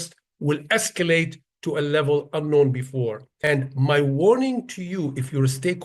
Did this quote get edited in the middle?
yes; 1 cut; at 3.3 s

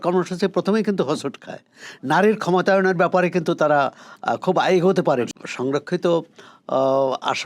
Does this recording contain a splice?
yes; 1 cut; at 5.3 s

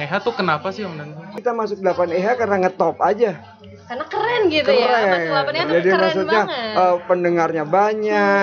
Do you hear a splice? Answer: yes; 1 cut; at 1.3 s

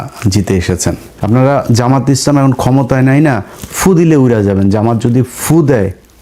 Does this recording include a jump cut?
yes; 1 cut; at 1.1 s

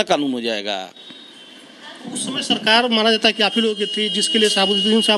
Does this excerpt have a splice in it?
no; 0 cuts

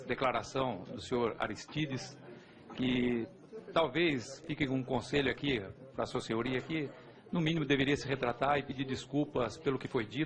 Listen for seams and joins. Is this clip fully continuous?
no; 1 cut; at 9.1 s

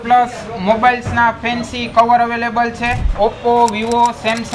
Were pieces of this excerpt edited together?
yes; 1 cut; at 3.0 s

